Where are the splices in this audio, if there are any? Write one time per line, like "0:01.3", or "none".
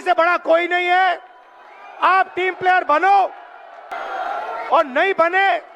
0:04.0